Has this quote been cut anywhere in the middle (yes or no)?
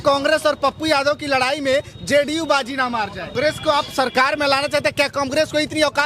yes